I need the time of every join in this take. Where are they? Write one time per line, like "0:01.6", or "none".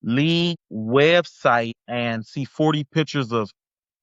none